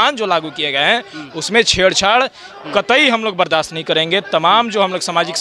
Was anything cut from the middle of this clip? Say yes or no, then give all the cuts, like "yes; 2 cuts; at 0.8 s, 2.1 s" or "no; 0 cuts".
no; 0 cuts